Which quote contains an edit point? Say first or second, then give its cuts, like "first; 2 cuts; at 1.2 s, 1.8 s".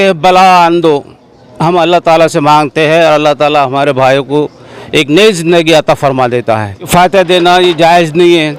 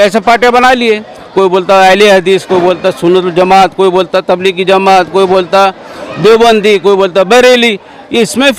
first; 1 cut; at 6.8 s